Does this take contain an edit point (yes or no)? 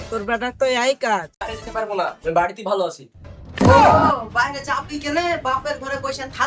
yes